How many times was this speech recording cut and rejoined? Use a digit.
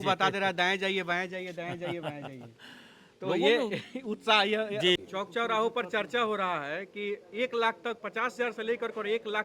1